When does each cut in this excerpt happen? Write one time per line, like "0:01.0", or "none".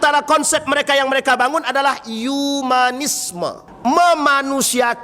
0:03.7